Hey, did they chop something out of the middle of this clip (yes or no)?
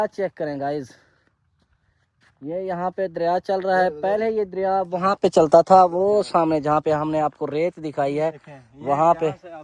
no